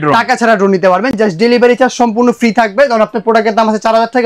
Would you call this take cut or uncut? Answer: uncut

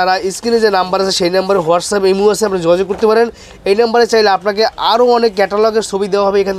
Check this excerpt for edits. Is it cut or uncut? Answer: uncut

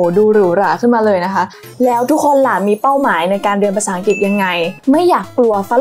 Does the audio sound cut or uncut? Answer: cut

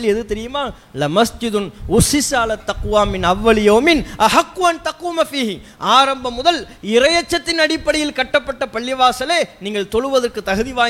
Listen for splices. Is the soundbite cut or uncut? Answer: uncut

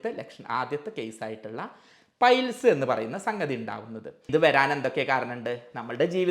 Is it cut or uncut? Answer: cut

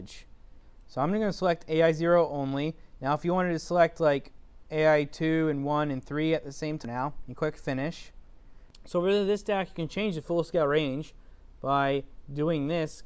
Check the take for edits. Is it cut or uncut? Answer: cut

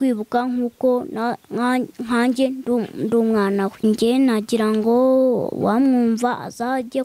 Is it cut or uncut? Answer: cut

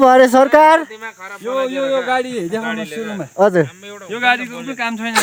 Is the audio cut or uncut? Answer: uncut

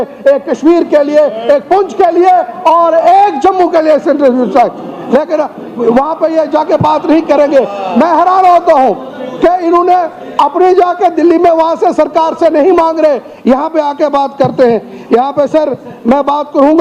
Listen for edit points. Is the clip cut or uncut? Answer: uncut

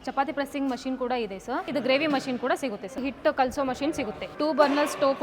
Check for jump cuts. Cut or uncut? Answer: cut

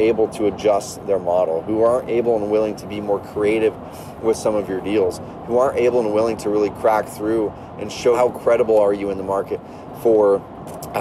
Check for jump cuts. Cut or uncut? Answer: uncut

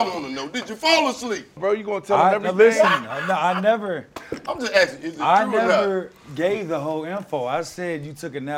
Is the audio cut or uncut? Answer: cut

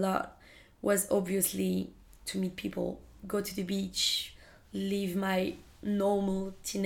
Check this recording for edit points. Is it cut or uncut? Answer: uncut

